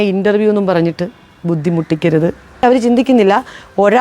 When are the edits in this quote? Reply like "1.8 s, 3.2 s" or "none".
2.6 s